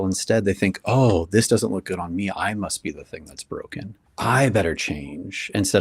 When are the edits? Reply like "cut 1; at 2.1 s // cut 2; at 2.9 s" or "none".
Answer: cut 1; at 4.0 s